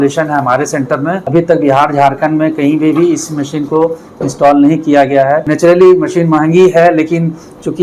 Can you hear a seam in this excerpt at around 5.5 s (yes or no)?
yes